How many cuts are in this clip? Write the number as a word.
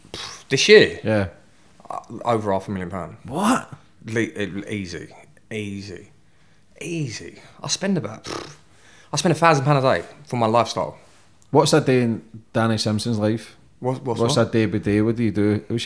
zero